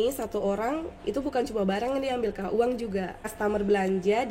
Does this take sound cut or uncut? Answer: cut